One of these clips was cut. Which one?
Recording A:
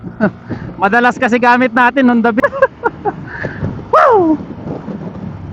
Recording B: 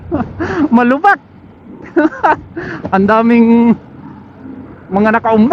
A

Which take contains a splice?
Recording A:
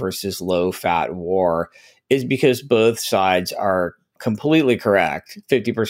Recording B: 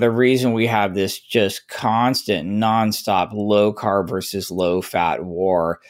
A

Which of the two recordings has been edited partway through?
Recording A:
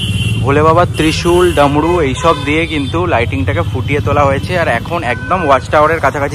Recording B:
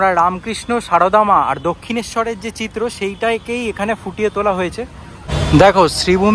B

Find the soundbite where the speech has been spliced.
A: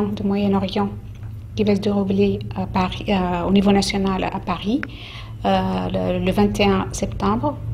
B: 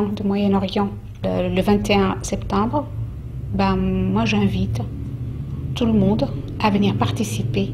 B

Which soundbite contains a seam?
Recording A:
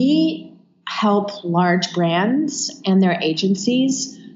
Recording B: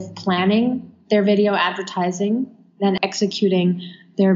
B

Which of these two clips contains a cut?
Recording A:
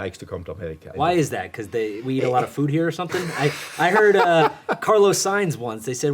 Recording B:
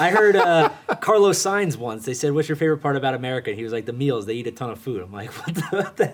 A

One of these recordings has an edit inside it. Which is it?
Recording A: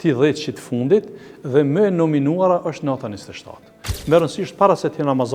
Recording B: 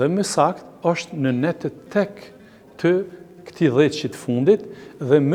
A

